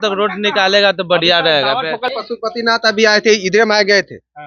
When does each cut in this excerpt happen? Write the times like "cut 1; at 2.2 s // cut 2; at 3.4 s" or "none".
cut 1; at 2.1 s